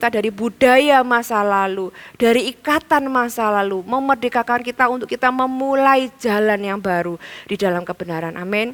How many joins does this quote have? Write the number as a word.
zero